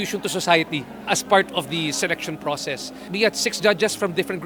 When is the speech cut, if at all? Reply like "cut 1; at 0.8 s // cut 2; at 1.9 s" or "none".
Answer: none